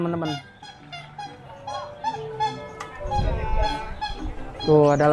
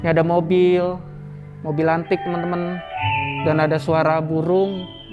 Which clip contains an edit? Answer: second; 1 cut; at 2.9 s

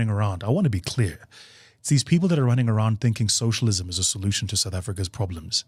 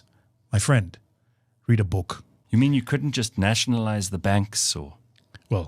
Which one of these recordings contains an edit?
second; 1 cut; at 2.3 s

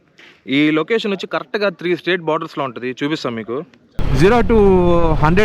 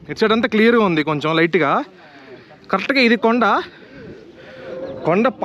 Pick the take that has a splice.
first; 1 cut; at 4.0 s

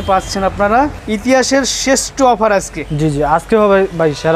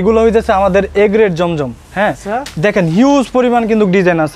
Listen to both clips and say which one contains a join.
first; 1 cut; at 1.0 s

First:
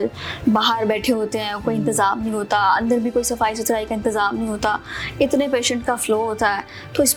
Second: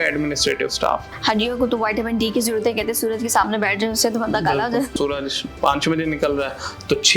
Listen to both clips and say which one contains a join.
second; 2 cuts; at 1.1 s, 4.9 s

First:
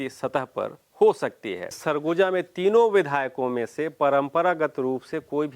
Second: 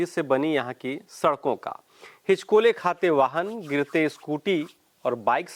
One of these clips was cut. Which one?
first; 1 cut; at 1.8 s

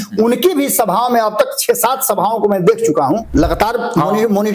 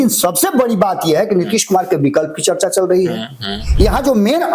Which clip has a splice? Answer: first; 1 cut; at 3.2 s

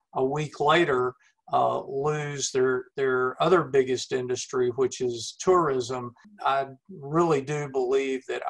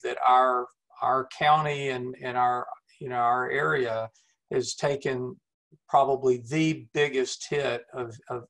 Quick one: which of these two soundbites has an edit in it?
first; 1 cut; at 6.3 s

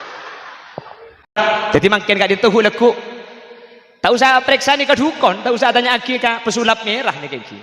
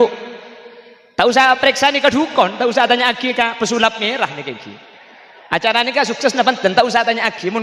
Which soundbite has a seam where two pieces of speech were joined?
first; 1 cut; at 1.3 s

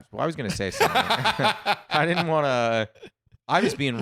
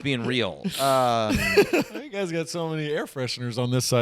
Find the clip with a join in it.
second; 1 cut; at 2.0 s

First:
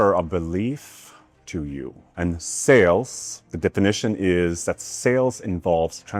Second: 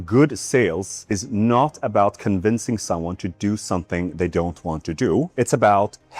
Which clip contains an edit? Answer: second; 1 cut; at 5.3 s

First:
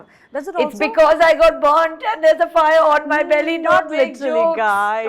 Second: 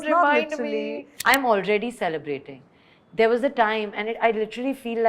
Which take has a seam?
second; 1 cut; at 1.1 s

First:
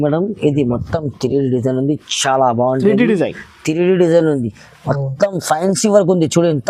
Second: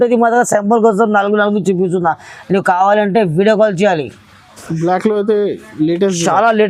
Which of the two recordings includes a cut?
second; 1 cut; at 4.6 s

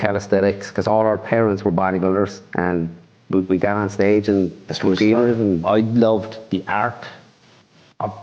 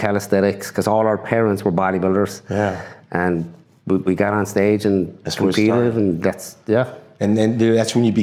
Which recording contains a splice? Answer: first; 2 cuts; at 2.4 s, 5.6 s

